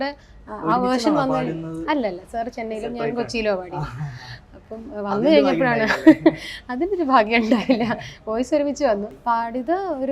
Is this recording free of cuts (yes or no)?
no